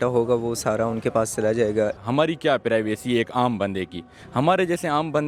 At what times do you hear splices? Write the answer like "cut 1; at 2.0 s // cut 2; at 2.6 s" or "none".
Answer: cut 1; at 2.0 s // cut 2; at 4.2 s